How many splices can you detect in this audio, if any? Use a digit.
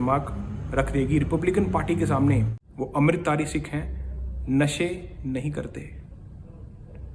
1